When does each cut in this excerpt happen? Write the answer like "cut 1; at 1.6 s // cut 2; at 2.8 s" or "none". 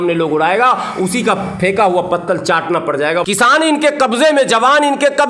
cut 1; at 3.2 s